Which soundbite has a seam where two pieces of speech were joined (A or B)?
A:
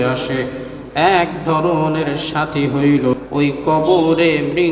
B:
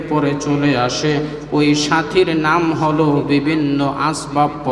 A